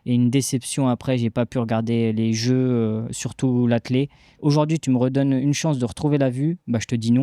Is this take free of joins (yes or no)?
no